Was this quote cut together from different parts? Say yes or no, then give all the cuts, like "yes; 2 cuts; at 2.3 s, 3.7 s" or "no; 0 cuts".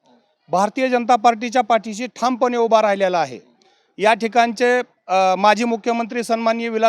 no; 0 cuts